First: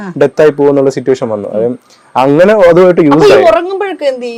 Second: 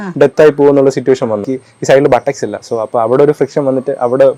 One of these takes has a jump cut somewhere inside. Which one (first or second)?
second